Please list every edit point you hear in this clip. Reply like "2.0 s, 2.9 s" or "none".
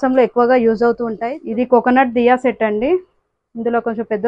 1.1 s